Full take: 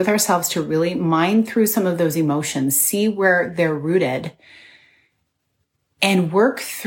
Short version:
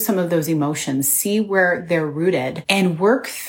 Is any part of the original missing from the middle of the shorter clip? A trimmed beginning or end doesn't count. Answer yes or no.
yes